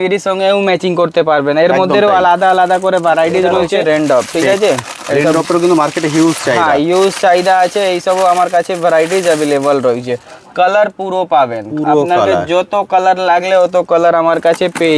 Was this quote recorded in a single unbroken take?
no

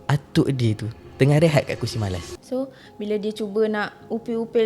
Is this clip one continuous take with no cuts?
no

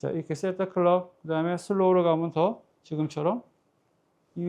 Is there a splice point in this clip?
no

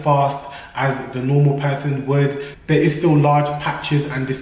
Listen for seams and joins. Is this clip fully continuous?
yes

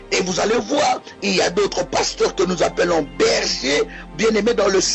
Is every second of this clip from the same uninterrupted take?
no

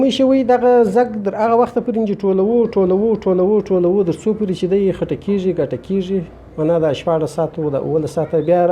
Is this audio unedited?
yes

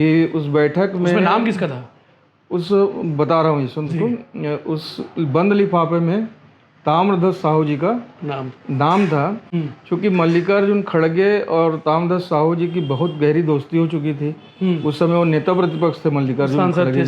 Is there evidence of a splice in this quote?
no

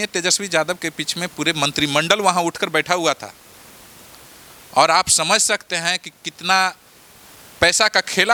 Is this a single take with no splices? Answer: yes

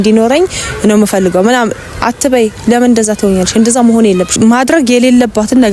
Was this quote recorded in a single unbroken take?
no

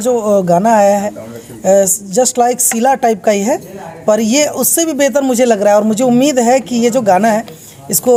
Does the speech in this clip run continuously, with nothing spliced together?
yes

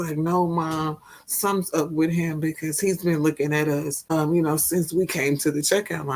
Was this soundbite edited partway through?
yes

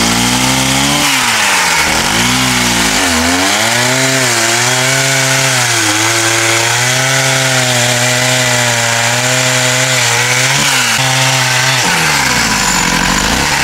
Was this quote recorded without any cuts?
no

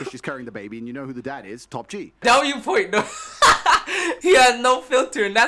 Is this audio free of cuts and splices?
no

